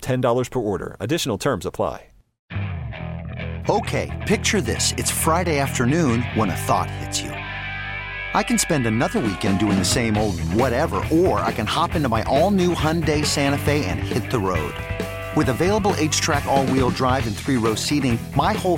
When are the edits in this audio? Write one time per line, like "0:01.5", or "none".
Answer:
0:02.3